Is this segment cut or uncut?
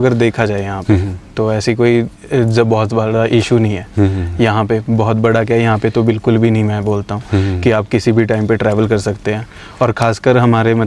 uncut